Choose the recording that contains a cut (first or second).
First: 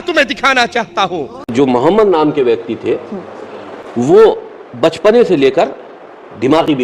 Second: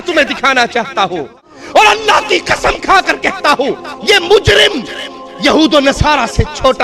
second